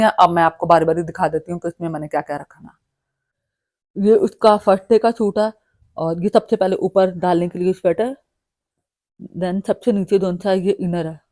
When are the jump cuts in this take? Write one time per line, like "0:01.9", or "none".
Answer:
none